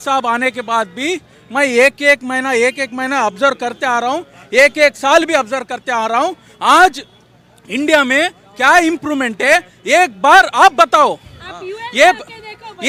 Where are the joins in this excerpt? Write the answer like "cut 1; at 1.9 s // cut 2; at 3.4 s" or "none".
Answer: none